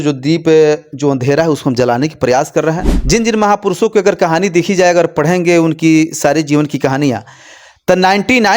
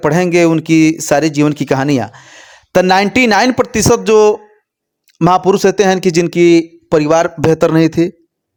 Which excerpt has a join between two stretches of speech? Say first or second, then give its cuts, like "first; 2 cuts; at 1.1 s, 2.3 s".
first; 1 cut; at 2.9 s